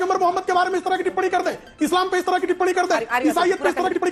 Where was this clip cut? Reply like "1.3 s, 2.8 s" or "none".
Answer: none